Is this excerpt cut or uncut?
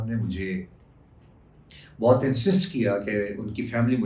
uncut